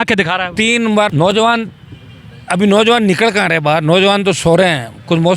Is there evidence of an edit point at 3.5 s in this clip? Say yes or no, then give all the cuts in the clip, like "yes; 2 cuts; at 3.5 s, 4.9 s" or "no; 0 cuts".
no; 1 cut; at 1.1 s